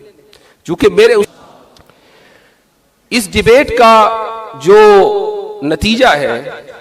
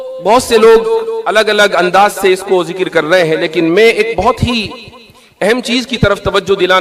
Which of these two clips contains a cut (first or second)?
first